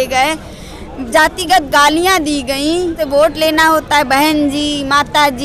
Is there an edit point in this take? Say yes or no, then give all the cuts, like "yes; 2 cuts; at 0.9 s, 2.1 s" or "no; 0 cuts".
yes; 1 cut; at 3.0 s